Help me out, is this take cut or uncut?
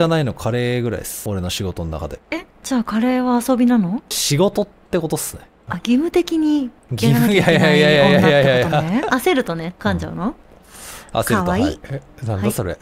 cut